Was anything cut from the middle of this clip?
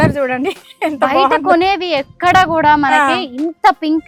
no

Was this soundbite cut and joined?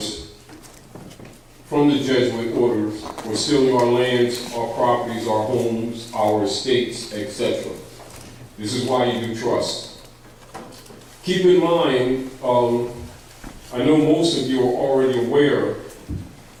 no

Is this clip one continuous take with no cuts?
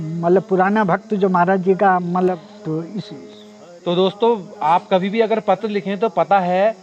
no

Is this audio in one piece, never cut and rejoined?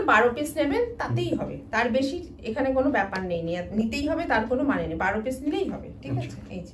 yes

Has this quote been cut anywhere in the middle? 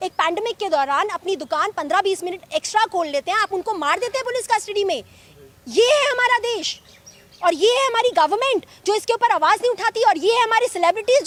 no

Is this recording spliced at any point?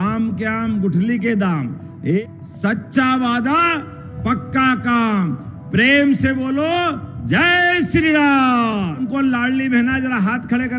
yes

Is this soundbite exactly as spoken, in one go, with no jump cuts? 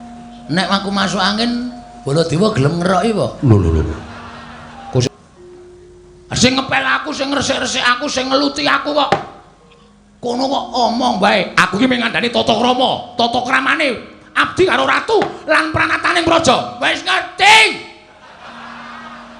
no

